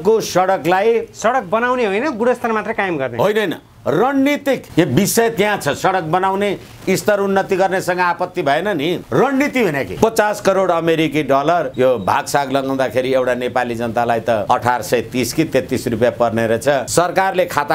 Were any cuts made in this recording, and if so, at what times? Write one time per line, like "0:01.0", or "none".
0:04.7
0:09.0
0:09.9
0:11.7
0:14.4
0:16.9

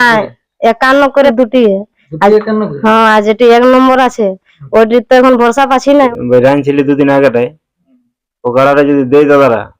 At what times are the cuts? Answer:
0:01.3
0:06.0

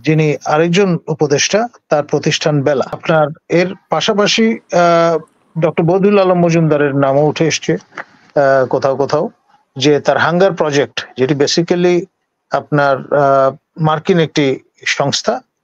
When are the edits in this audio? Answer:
0:03.0

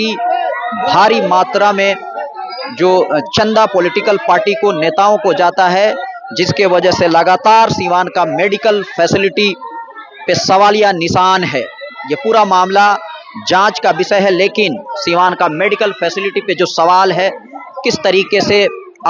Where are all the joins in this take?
none

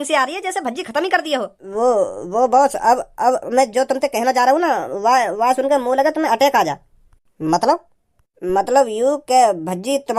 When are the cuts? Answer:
0:01.6

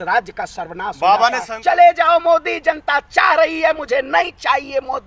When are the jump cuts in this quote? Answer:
0:01.5

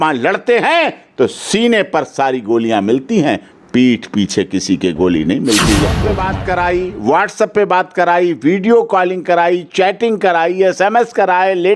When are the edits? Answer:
0:06.0

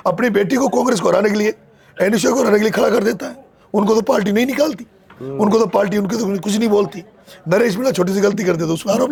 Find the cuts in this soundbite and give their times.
none

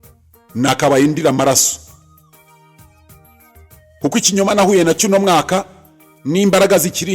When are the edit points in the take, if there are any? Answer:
none

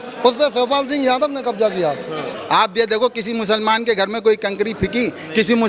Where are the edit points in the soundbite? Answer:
0:02.3

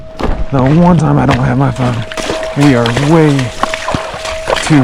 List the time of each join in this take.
0:02.2

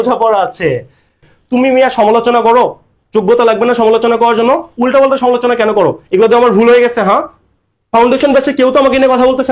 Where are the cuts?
0:01.2

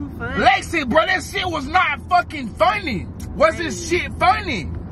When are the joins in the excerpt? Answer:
none

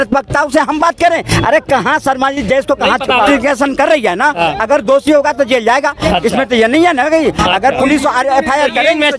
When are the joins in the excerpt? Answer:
0:03.3

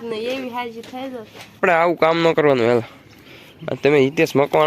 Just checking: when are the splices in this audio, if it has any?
0:01.6

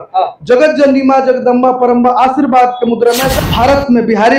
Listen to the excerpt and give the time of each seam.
0:03.3

